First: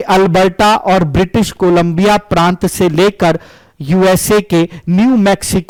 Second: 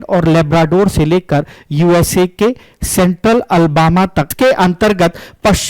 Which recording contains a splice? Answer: second; 1 cut; at 4.3 s

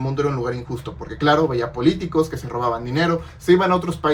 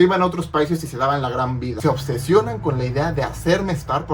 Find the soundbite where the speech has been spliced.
second; 1 cut; at 1.7 s

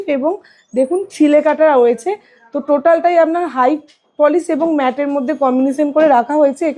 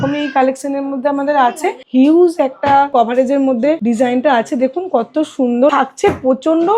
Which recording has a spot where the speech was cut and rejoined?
second; 4 cuts; at 1.8 s, 2.9 s, 3.8 s, 5.7 s

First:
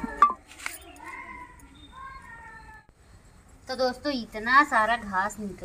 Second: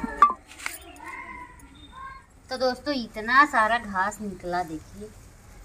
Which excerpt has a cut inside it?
second; 1 cut; at 2.2 s

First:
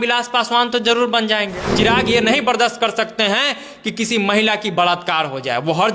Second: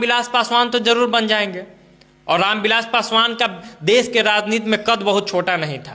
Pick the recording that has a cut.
first; 1 cut; at 1.6 s

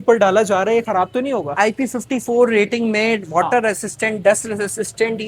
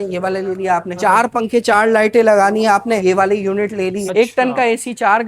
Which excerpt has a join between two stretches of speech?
second; 2 cuts; at 0.9 s, 4.0 s

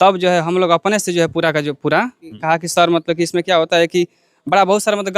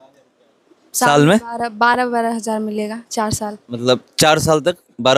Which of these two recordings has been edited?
first; 1 cut; at 2.3 s

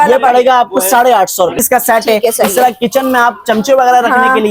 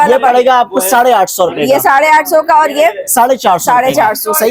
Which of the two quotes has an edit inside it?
first; 1 cut; at 1.6 s

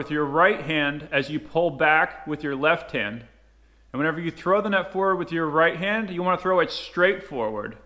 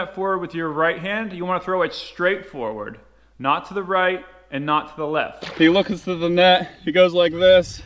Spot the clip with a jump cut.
second; 1 cut; at 5.4 s

